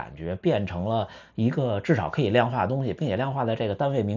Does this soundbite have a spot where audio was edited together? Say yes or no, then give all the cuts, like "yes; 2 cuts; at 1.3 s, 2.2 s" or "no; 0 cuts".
no; 0 cuts